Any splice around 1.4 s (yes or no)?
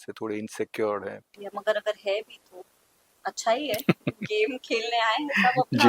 yes